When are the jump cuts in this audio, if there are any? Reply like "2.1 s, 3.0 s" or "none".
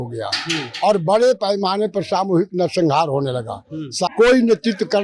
4.1 s